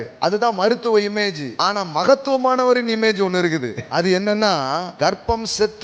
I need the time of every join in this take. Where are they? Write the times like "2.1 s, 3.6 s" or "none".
1.5 s, 3.8 s, 4.9 s